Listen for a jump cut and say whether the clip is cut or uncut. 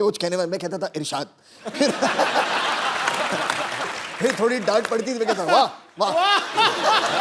cut